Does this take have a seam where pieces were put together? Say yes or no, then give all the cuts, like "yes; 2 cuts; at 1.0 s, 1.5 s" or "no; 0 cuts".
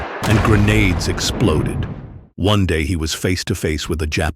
no; 0 cuts